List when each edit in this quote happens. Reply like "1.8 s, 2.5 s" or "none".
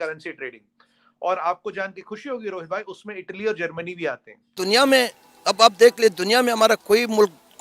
4.5 s